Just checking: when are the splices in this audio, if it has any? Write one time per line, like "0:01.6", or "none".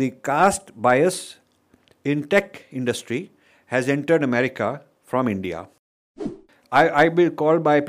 0:06.3